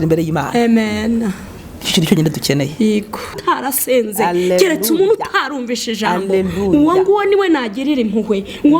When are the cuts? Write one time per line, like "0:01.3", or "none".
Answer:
0:03.4